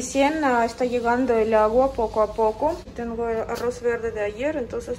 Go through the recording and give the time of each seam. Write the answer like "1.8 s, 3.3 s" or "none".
2.9 s